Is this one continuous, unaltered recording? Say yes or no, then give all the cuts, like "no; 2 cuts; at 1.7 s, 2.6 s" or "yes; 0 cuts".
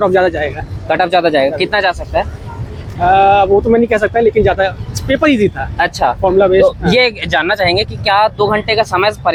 yes; 0 cuts